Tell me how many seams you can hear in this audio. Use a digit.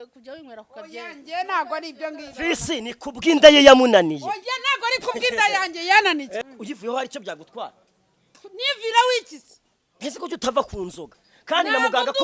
1